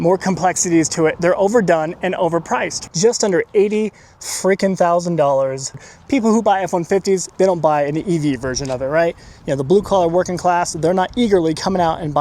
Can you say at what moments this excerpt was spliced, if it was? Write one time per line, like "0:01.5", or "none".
0:02.8
0:05.9